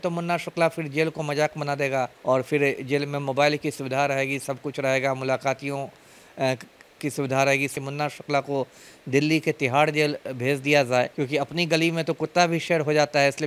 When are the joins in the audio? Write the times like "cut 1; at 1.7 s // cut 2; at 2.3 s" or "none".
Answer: cut 1; at 2.1 s // cut 2; at 7.8 s // cut 3; at 11.1 s